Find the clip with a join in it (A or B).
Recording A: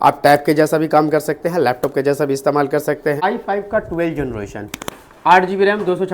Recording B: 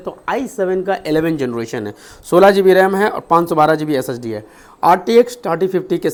A